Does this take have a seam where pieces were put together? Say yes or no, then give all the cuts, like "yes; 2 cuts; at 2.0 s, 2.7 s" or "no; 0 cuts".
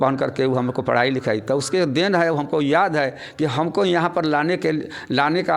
no; 0 cuts